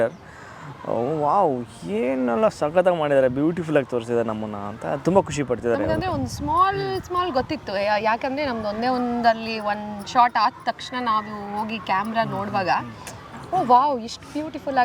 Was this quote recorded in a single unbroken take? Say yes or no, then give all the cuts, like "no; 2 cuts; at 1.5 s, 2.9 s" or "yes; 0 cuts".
yes; 0 cuts